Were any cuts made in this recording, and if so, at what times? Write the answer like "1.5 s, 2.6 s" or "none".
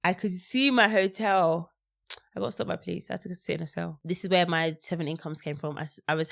3.9 s